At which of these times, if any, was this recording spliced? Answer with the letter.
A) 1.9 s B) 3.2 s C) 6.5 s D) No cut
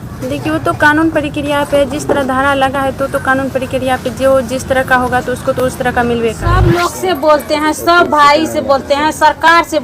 C